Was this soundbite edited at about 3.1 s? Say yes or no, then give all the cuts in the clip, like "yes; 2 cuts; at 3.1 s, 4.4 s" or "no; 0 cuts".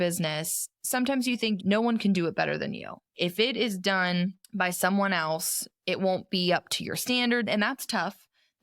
yes; 1 cut; at 3.1 s